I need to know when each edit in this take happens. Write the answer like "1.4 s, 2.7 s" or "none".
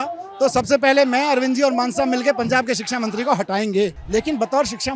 4.0 s

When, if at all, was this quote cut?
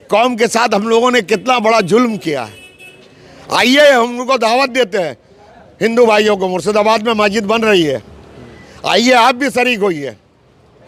none

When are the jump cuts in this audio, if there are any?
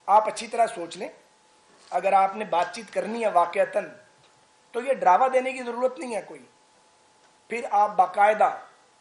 none

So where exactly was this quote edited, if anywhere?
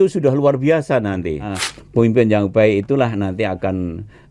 1.6 s

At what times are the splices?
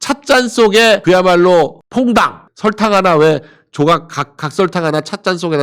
2.5 s

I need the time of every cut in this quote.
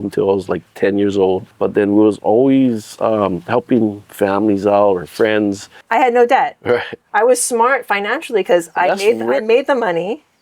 1.5 s, 5.7 s

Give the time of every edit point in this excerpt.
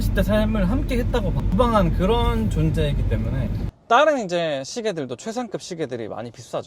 1.4 s, 3.7 s

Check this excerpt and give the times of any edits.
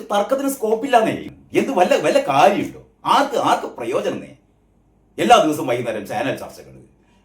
1.3 s

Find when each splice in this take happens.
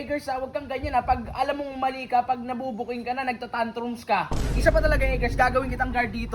4.4 s

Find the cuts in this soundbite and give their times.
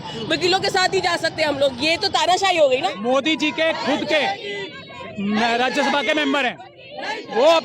2.9 s

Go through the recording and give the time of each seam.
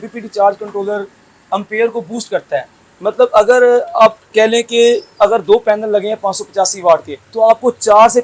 7.2 s

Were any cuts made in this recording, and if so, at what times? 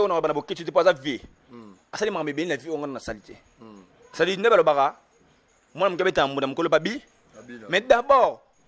none

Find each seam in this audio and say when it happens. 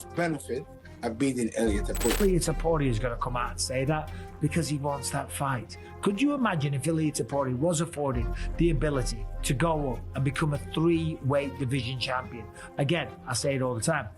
2.2 s

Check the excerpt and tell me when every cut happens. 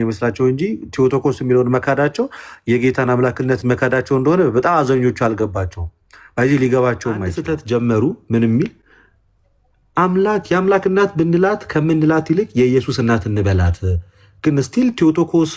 7.4 s

